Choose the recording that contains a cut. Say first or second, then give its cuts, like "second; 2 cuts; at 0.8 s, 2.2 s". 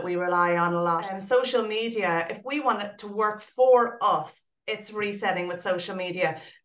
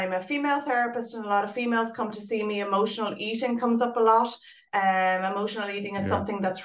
first; 1 cut; at 1.1 s